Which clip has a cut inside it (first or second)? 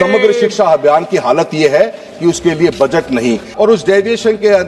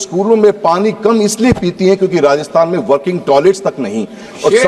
first